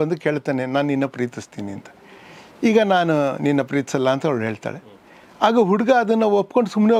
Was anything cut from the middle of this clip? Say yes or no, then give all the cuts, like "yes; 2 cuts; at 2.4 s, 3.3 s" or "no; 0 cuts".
no; 0 cuts